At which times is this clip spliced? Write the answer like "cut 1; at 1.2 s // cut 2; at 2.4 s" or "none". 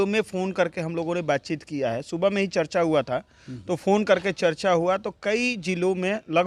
none